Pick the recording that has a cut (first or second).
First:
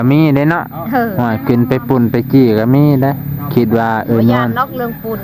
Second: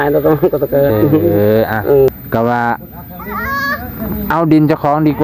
second